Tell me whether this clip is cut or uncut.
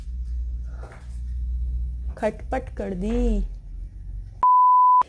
cut